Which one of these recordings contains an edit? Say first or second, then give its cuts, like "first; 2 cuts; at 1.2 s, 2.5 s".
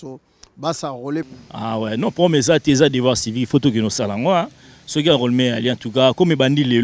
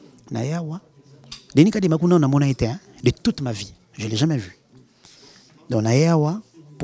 first; 1 cut; at 1.4 s